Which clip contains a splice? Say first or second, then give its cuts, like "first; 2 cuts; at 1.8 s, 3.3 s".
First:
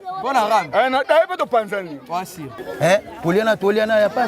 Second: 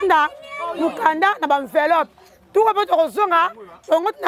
first; 1 cut; at 2.6 s